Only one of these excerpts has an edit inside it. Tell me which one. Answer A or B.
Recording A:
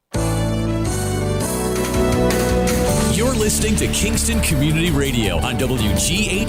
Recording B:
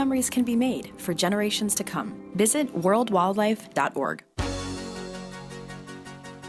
B